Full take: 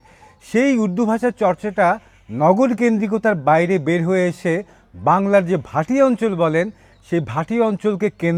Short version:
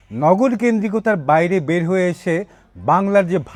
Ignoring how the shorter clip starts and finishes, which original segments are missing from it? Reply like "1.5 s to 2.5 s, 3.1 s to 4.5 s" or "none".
none